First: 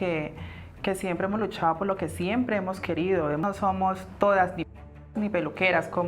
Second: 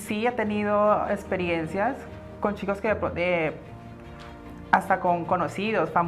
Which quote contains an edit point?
first; 1 cut; at 3.4 s

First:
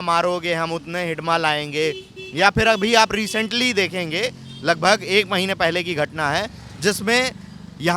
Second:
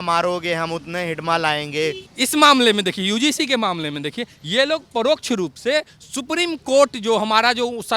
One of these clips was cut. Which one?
second; 1 cut; at 2.1 s

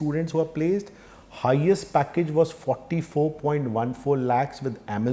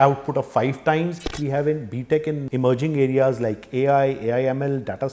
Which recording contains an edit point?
second; 2 cuts; at 1.4 s, 2.4 s

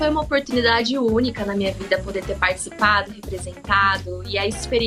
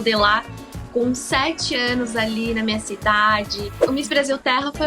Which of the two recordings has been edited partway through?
second; 1 cut; at 3.8 s

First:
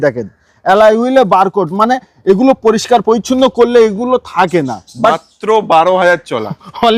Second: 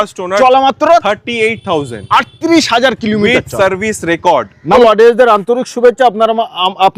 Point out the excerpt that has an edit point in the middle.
second; 1 cut; at 4.8 s

